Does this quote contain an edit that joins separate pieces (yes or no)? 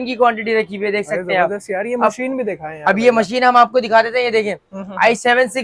no